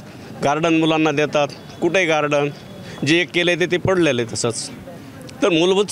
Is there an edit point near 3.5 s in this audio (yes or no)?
no